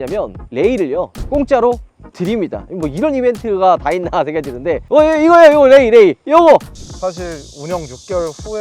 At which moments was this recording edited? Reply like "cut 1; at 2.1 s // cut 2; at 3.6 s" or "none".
cut 1; at 6.7 s